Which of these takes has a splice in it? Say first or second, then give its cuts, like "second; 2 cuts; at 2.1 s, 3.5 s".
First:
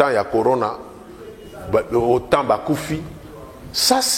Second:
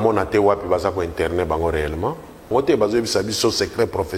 second; 1 cut; at 2.5 s